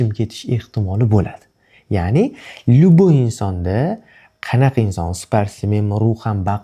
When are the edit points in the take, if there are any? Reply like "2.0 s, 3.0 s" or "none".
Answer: none

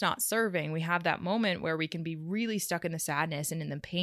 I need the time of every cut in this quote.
none

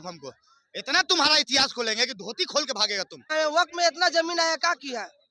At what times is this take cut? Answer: 3.3 s

